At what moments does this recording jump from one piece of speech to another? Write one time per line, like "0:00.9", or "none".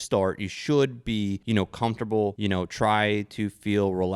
0:01.4
0:02.4